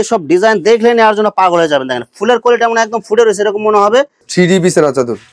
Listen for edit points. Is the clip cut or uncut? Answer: cut